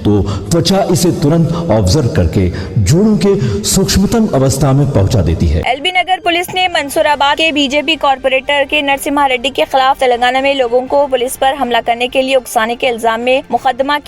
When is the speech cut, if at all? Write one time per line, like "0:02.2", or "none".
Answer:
0:05.6